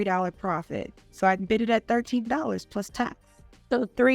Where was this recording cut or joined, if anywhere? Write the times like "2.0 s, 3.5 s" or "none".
none